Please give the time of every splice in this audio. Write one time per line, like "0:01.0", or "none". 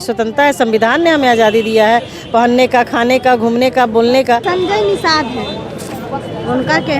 0:04.4